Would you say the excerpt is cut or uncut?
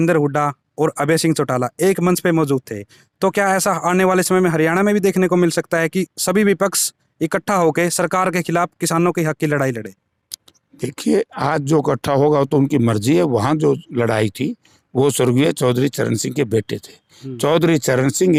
uncut